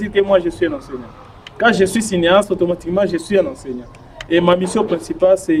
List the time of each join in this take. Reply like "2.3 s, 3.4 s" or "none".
none